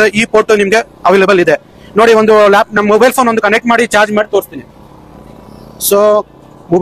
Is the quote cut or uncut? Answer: uncut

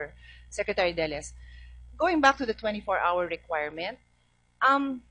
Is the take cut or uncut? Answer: uncut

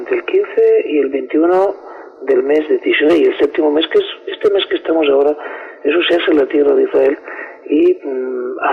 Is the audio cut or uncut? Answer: cut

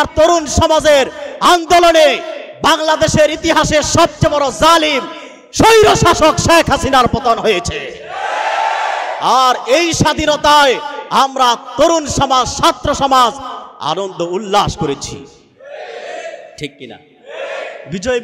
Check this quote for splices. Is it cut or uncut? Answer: uncut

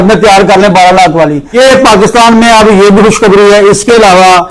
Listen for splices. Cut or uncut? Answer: cut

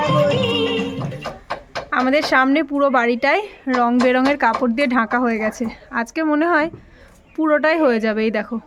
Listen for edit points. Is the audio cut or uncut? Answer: cut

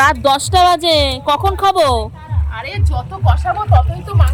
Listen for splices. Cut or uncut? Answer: uncut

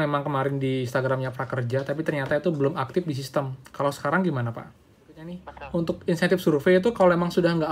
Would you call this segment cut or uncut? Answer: cut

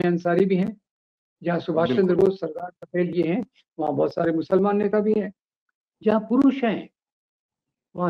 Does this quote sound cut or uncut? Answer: uncut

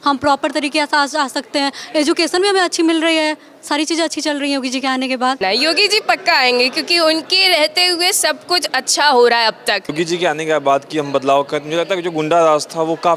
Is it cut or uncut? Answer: cut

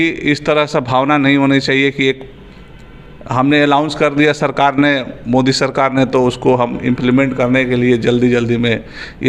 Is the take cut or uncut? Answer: uncut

